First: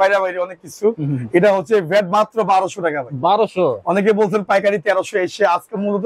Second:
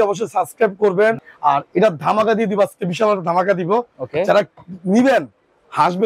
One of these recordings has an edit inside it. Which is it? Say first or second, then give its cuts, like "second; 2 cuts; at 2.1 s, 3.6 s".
second; 1 cut; at 1.2 s